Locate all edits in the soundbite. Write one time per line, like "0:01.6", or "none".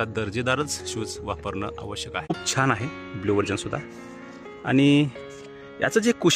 0:02.3